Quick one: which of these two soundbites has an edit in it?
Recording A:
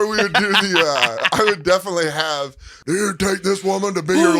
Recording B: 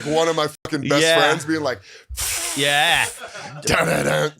A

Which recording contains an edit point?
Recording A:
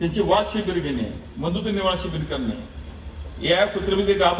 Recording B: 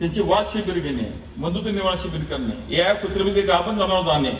B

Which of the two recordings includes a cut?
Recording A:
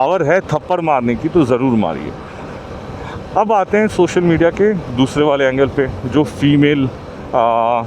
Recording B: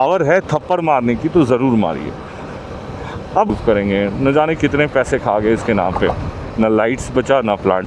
B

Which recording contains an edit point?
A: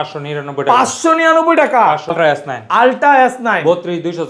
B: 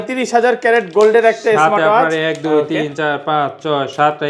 A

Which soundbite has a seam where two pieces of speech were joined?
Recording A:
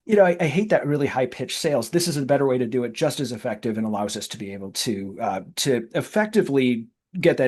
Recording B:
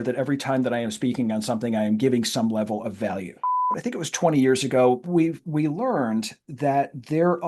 B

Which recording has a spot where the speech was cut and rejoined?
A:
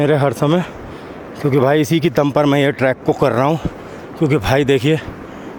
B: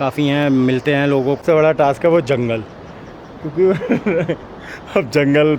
B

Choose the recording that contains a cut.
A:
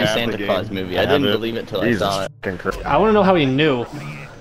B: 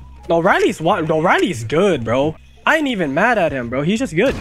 A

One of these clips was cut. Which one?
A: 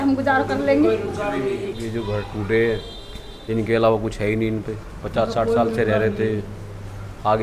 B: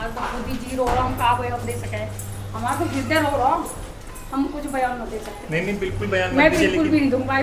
A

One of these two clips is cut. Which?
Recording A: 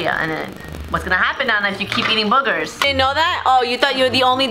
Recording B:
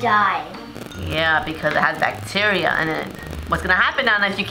A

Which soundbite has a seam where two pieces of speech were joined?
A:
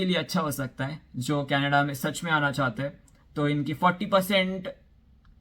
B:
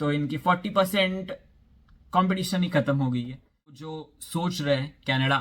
B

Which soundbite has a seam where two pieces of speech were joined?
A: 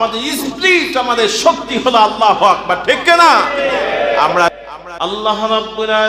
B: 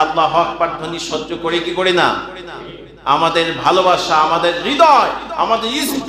A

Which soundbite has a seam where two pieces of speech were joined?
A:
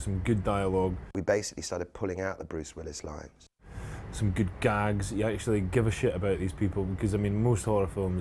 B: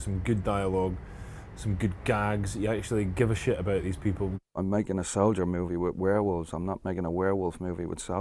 B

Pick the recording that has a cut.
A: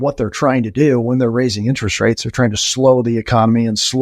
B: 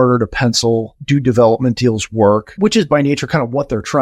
B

